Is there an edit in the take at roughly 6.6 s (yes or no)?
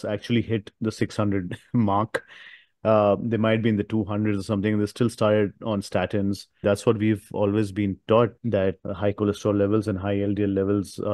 yes